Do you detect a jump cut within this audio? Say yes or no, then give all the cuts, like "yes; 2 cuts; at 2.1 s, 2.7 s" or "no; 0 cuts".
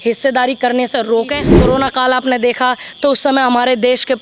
yes; 1 cut; at 1.5 s